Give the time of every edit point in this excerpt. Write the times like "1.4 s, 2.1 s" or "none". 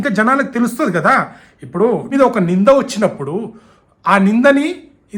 2.1 s